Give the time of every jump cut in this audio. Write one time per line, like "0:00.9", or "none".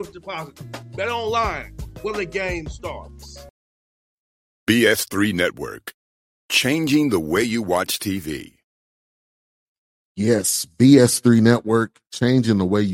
0:03.4

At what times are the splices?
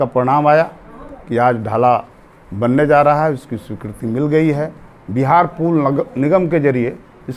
none

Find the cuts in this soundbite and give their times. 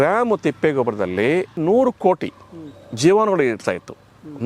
none

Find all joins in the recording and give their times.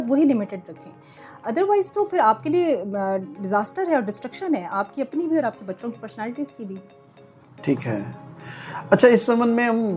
none

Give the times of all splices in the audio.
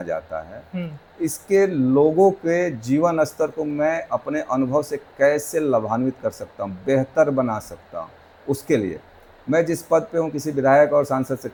none

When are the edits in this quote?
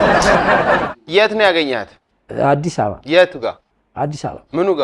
0:01.0

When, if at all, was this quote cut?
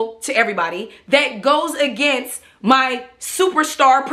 none

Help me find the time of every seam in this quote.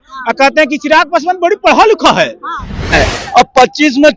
0:02.9

